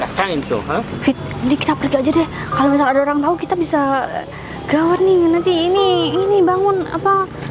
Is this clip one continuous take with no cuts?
no; 1 cut; at 0.9 s

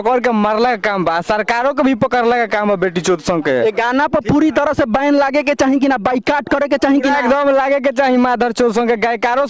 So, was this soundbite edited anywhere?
no; 0 cuts

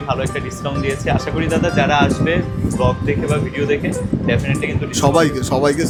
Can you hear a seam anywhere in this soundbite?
no; 0 cuts

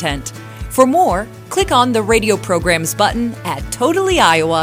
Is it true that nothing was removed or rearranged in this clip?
yes; 0 cuts

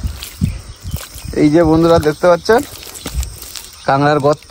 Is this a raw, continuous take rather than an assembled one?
yes; 0 cuts

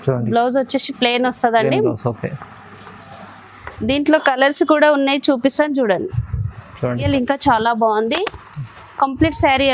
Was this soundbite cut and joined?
yes; 1 cut; at 7.1 s

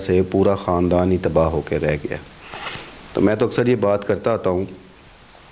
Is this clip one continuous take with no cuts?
yes; 0 cuts

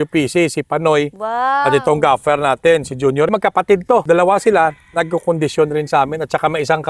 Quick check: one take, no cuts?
no; 1 cut; at 3.3 s

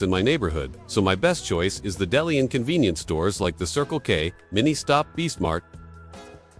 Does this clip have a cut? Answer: yes; 1 cut; at 5.7 s

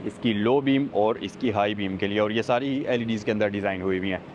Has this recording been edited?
no; 0 cuts

